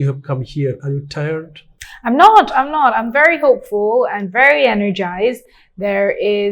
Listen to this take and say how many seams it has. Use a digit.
0